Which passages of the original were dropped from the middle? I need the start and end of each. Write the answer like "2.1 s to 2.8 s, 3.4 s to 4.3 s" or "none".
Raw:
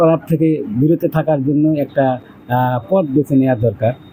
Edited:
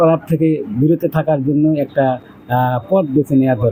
none